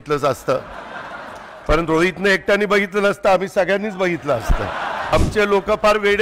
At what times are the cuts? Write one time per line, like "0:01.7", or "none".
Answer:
0:05.1